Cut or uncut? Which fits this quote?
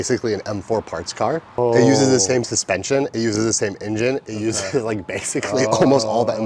uncut